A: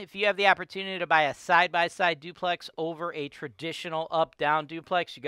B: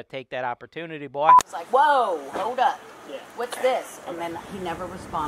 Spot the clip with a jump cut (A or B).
B